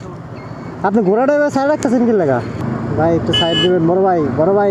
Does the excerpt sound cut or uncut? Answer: cut